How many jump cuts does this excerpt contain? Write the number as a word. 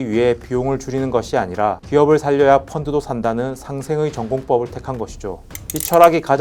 zero